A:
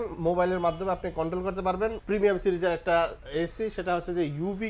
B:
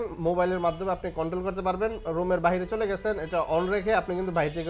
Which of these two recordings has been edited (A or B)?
A